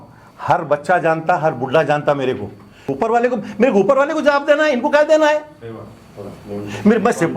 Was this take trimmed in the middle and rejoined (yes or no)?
yes